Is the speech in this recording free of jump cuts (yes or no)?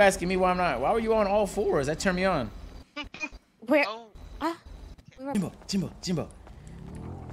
no